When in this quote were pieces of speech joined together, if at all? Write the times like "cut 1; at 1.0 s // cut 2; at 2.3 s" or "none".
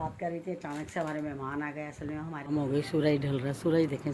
cut 1; at 2.4 s